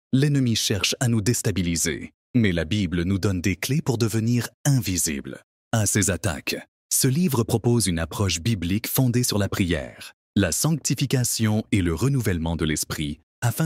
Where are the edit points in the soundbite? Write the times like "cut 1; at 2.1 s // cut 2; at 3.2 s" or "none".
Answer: none